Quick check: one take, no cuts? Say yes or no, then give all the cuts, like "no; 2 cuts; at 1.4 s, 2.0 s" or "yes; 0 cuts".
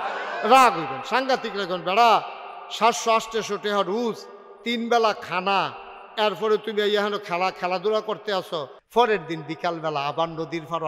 no; 1 cut; at 8.8 s